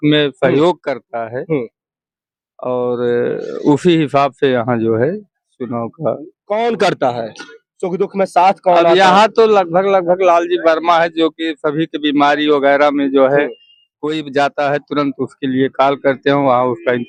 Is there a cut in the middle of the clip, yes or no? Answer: no